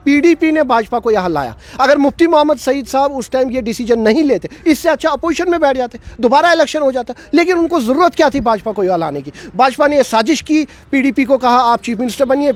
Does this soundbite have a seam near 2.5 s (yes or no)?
no